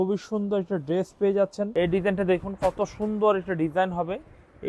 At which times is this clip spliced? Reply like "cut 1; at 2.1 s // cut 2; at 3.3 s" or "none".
cut 1; at 1.7 s